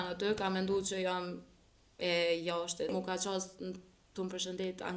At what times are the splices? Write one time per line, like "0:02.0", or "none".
0:02.9